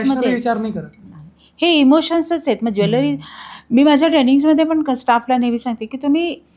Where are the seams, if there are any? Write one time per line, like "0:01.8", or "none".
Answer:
none